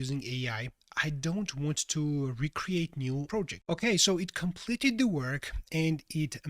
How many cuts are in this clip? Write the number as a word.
one